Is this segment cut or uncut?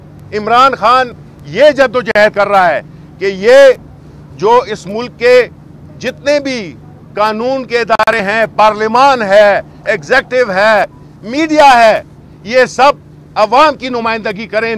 uncut